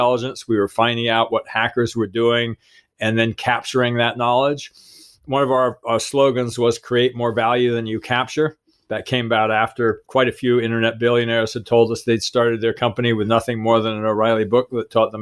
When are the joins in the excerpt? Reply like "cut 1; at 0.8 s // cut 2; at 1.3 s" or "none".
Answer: cut 1; at 3.4 s // cut 2; at 5.8 s // cut 3; at 10.1 s